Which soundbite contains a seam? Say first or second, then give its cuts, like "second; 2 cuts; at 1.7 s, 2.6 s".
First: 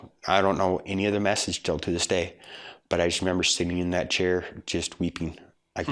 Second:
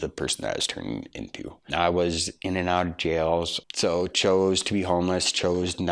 second; 2 cuts; at 1.5 s, 3.6 s